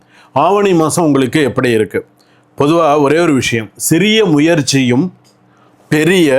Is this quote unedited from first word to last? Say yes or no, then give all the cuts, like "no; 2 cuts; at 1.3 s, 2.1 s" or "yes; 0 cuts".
yes; 0 cuts